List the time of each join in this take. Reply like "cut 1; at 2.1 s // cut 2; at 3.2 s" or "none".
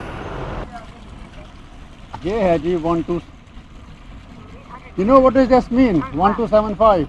none